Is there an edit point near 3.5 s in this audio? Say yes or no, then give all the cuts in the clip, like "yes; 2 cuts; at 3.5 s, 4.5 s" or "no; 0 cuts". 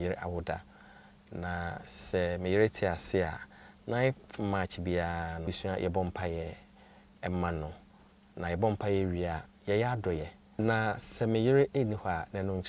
no; 1 cut; at 5.5 s